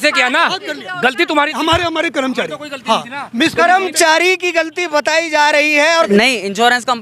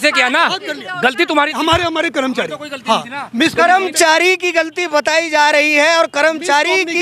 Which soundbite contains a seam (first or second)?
first